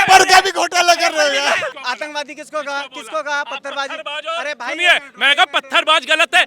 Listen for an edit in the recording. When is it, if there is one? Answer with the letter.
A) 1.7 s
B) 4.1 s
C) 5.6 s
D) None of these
A